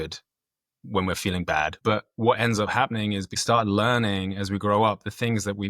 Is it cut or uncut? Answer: cut